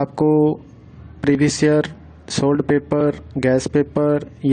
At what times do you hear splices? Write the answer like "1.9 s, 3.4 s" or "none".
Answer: 2.8 s